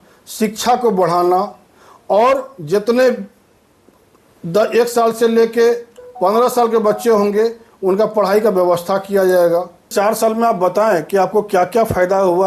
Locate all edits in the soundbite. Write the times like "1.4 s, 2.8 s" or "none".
9.9 s